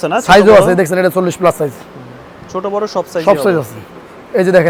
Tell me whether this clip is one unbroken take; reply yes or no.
yes